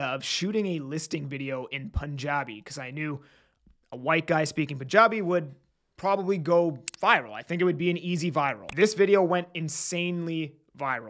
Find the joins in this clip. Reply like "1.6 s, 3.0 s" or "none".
8.6 s